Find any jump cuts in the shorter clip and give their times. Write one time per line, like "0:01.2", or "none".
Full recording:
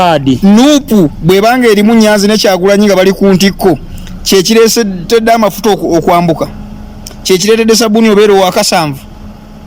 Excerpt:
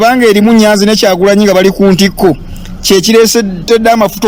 none